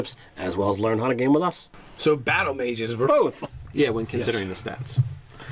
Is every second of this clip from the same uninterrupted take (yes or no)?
yes